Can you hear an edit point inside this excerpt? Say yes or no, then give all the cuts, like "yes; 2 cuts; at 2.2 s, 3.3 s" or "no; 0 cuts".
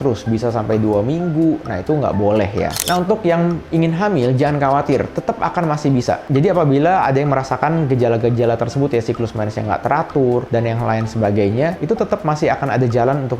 yes; 1 cut; at 2.8 s